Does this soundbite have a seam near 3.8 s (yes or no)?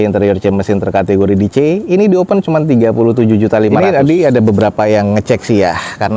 yes